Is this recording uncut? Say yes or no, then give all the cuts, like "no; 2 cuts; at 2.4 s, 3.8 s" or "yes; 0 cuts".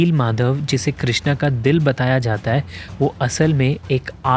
yes; 0 cuts